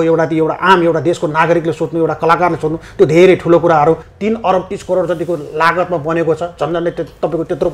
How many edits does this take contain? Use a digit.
1